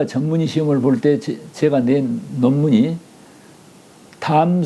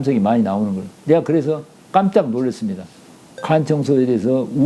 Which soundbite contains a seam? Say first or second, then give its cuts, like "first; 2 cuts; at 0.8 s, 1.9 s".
second; 1 cut; at 3.3 s